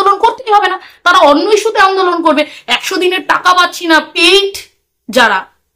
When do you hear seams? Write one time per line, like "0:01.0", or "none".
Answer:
0:04.1